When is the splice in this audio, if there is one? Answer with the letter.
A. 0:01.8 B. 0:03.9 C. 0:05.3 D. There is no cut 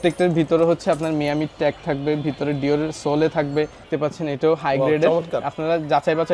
B